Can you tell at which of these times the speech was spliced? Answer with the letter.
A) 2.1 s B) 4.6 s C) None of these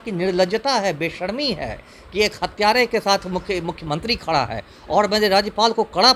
C